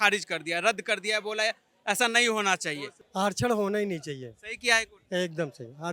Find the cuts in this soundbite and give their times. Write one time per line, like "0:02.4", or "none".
none

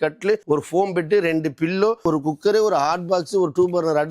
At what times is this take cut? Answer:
0:02.0

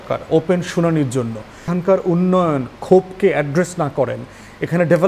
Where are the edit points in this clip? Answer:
0:01.7

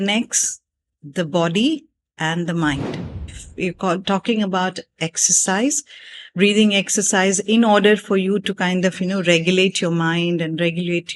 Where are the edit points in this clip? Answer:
0:03.4

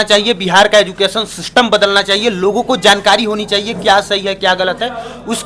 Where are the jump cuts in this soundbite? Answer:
none

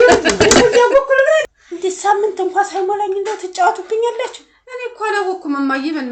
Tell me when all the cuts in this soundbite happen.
0:01.5

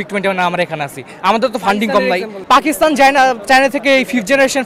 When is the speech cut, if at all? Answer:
0:02.3

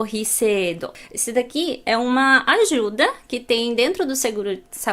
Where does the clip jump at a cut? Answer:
0:00.9

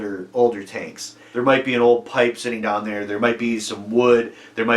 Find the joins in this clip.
0:01.2

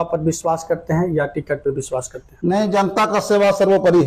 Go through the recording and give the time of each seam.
none

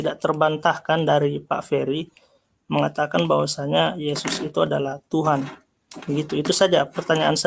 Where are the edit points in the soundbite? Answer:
none

